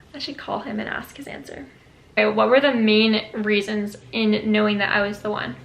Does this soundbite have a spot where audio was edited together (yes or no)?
yes